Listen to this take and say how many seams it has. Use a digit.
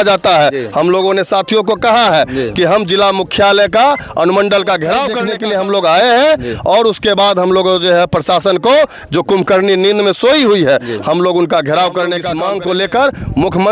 2